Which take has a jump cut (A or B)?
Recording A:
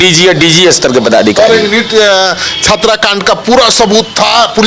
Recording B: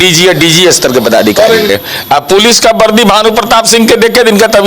B